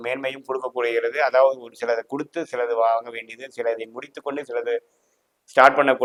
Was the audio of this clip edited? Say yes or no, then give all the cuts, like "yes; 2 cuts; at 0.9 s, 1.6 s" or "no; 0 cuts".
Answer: no; 0 cuts